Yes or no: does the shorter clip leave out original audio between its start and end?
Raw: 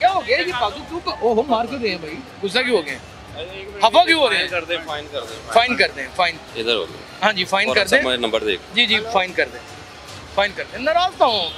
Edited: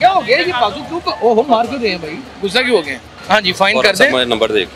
yes